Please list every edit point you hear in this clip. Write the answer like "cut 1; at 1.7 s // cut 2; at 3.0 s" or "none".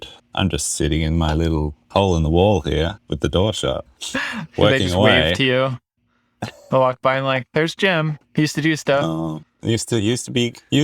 cut 1; at 3.0 s // cut 2; at 3.9 s // cut 3; at 8.2 s // cut 4; at 9.5 s